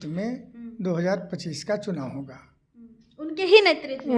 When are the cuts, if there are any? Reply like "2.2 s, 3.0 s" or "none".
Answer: none